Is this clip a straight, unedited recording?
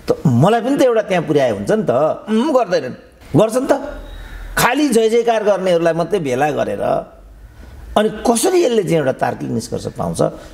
yes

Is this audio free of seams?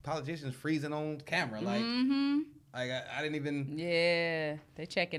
yes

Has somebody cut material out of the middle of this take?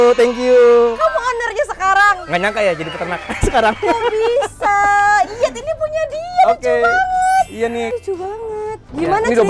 no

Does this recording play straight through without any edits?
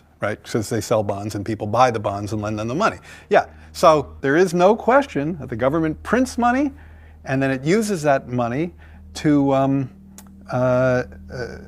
no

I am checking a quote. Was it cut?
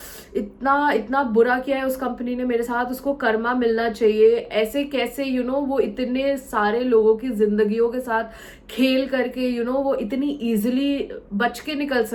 no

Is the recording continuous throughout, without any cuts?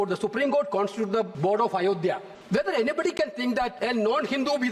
no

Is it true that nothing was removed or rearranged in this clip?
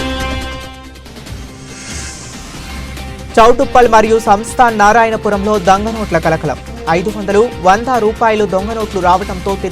no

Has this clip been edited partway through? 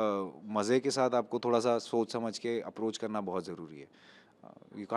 no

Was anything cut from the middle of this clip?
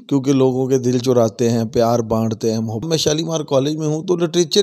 yes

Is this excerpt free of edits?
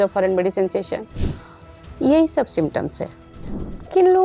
yes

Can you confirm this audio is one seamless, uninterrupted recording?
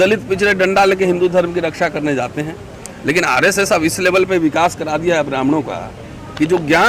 yes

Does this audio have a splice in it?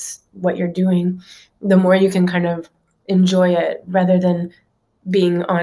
no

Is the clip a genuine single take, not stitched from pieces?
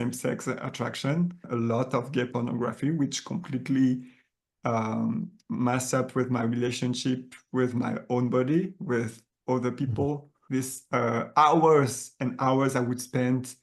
no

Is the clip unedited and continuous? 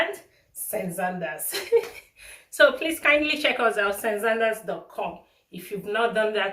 yes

